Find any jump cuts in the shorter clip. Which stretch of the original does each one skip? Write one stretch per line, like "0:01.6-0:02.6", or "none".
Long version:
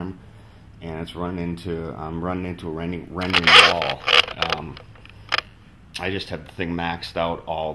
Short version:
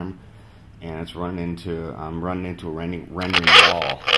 none

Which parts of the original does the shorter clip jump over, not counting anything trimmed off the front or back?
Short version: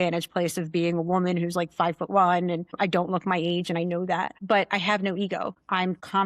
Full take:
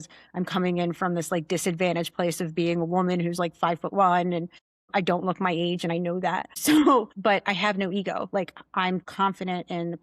0:04.5-0:04.8
0:06.5-0:07.1
0:08.3-0:08.6

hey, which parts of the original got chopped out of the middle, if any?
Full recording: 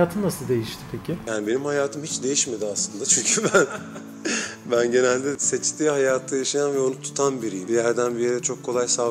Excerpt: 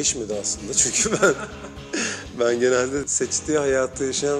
none

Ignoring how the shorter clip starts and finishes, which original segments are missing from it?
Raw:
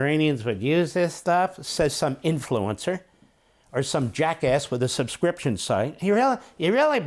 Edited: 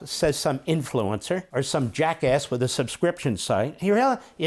0:03.0-0:03.7

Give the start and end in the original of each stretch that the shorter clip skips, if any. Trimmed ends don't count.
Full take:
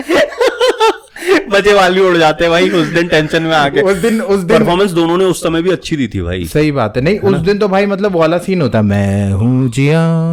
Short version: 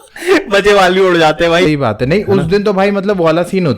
0:02.7-0:06.6

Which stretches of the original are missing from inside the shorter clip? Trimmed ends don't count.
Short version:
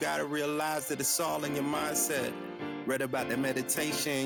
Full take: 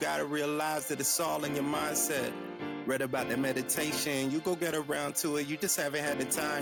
none

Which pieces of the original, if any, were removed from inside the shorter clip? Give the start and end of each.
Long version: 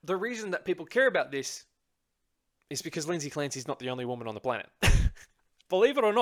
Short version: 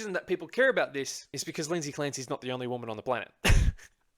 0:01.6-0:02.6

